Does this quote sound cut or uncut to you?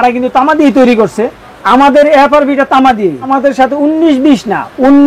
cut